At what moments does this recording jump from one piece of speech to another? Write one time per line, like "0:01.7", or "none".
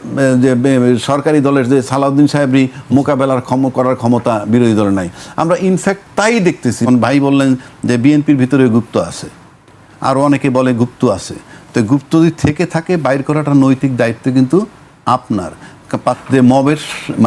0:06.9
0:16.2